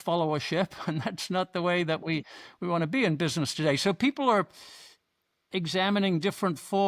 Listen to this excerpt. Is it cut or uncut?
uncut